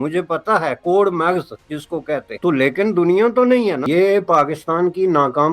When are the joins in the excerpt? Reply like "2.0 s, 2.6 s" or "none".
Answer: 2.3 s, 3.8 s

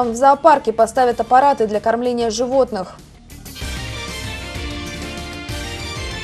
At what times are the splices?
3.1 s

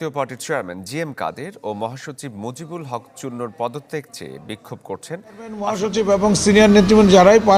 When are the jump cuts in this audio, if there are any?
5.8 s

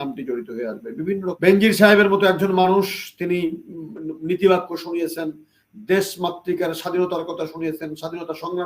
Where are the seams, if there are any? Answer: 1.4 s

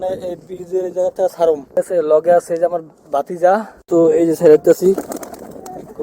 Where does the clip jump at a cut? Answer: 1.8 s, 3.7 s

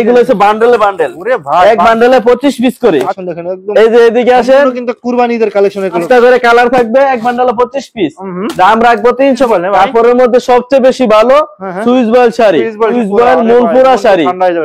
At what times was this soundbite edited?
3.2 s, 6.0 s, 9.5 s, 12.9 s

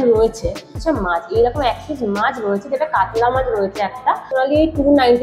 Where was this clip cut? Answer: 0.8 s, 4.3 s

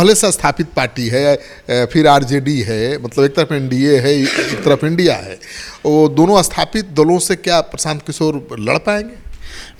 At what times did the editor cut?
none

